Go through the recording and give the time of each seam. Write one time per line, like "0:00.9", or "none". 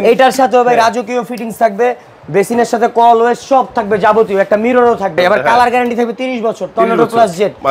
0:05.2